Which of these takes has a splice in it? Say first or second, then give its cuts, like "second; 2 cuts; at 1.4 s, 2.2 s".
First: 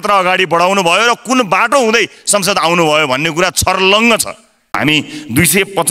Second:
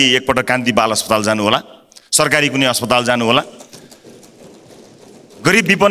first; 1 cut; at 4.8 s